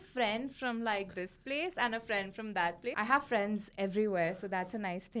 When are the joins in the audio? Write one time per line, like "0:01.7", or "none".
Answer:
0:03.0